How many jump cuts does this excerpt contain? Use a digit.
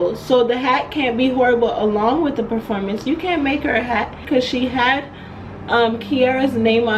1